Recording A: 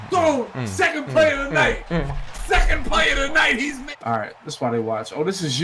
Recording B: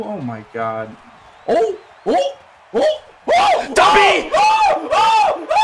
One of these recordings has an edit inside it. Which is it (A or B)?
A